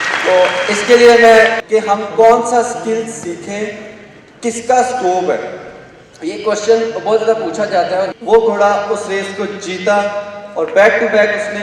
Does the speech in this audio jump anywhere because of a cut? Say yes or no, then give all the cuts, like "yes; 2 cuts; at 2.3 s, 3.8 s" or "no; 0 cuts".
yes; 2 cuts; at 1.6 s, 8.1 s